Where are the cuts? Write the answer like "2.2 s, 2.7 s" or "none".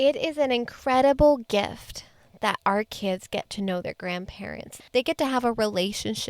4.8 s